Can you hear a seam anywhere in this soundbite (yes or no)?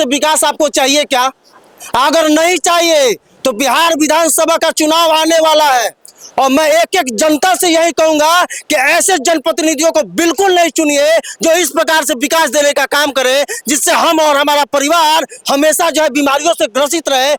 no